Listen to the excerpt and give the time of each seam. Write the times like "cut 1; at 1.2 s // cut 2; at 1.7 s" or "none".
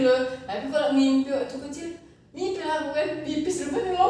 none